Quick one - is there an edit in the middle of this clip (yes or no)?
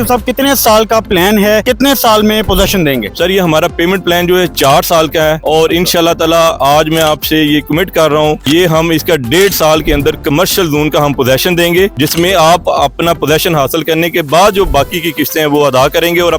yes